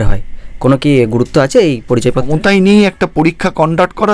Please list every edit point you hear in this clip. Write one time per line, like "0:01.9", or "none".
0:02.3